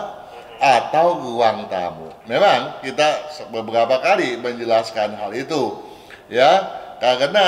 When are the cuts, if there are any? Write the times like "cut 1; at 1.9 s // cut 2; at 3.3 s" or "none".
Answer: none